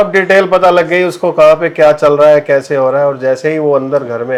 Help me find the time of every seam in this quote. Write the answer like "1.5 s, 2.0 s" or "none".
none